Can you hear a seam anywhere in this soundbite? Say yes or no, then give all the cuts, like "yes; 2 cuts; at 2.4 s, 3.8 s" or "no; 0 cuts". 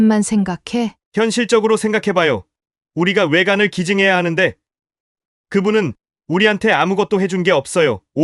no; 0 cuts